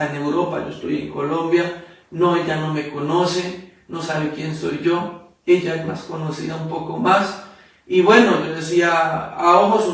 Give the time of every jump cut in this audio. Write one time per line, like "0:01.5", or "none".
none

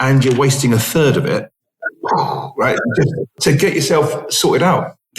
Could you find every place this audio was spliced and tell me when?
0:03.3

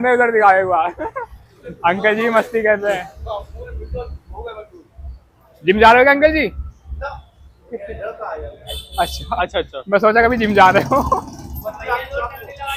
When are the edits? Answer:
none

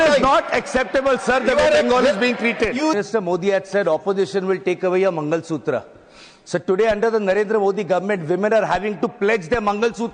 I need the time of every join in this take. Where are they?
0:02.9

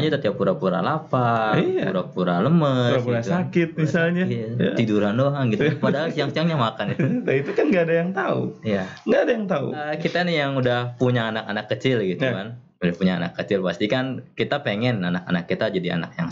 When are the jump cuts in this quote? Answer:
0:09.9

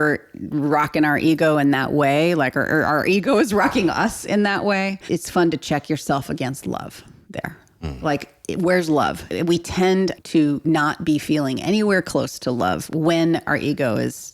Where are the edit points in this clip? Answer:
0:05.0
0:09.3
0:10.2

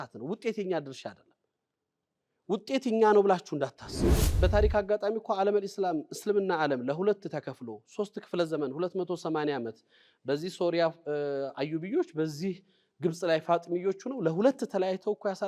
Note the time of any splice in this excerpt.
0:04.3

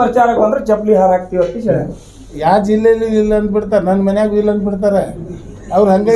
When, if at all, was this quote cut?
0:02.4

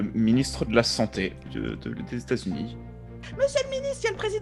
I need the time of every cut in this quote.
0:01.4
0:03.2

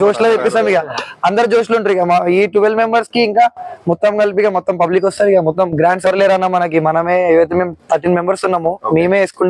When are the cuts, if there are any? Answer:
0:06.1

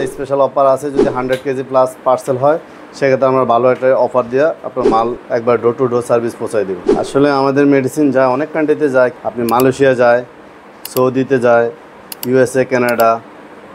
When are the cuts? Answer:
0:06.9
0:09.2

